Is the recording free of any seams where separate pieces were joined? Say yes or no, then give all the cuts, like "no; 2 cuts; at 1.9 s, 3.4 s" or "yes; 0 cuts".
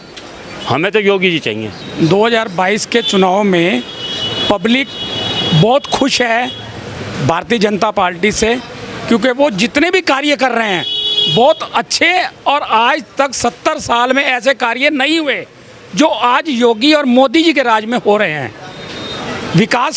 yes; 0 cuts